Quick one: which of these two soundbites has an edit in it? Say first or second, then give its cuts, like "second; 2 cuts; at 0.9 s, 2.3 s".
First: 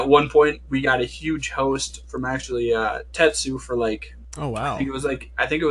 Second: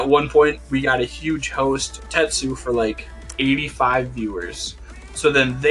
second; 2 cuts; at 2.0 s, 3.3 s